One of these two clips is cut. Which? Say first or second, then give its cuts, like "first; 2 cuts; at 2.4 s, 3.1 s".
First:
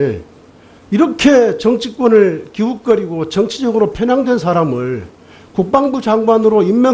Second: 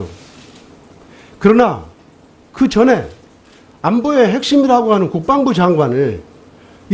first; 1 cut; at 4.7 s